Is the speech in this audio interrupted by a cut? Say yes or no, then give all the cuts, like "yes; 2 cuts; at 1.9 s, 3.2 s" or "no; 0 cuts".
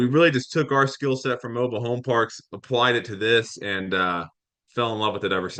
no; 0 cuts